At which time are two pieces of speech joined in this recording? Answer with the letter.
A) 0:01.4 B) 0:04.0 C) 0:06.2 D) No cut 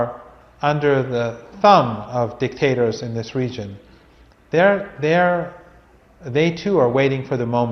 A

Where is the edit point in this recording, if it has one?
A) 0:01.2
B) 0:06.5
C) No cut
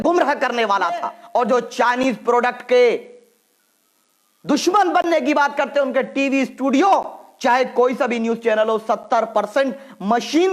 A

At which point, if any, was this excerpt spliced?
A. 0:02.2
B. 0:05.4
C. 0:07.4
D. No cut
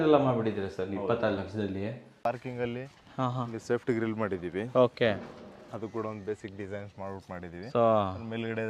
A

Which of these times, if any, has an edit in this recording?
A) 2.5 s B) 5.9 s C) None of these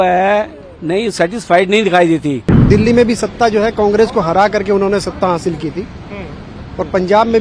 A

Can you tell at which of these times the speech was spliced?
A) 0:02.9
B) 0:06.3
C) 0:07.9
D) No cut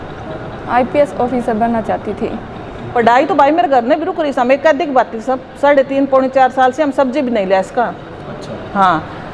A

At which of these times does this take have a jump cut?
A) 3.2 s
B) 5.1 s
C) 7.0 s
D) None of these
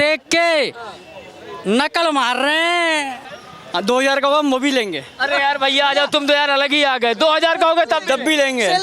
A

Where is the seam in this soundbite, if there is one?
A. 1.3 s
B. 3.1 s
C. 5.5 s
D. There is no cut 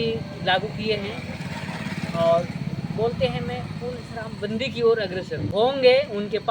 C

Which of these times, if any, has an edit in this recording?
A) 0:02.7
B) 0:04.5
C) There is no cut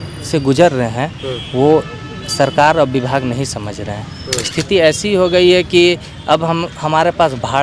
B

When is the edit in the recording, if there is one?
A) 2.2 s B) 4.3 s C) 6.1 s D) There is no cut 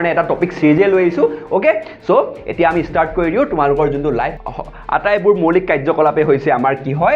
B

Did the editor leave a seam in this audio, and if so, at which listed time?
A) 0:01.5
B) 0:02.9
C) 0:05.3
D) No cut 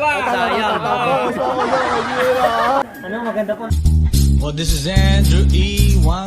B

